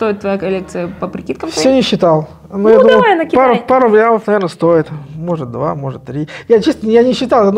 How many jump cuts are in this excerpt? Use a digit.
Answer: 0